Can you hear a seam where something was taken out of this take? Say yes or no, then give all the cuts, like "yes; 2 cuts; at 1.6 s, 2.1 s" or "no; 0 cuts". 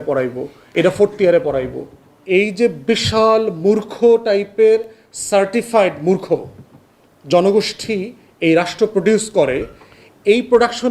yes; 1 cut; at 2.1 s